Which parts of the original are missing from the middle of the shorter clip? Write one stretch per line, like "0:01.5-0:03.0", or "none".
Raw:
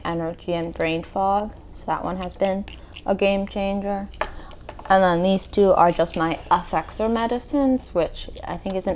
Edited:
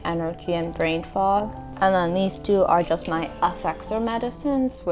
0:01.6-0:04.7